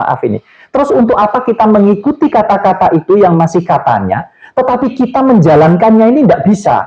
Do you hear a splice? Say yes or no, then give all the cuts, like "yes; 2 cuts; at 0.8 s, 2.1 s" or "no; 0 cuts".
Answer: no; 0 cuts